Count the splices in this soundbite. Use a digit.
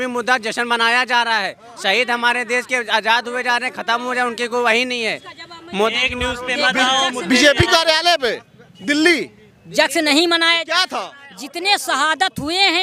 0